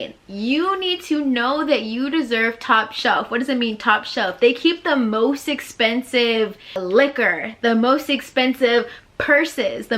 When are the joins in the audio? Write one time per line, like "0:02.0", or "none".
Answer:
0:06.8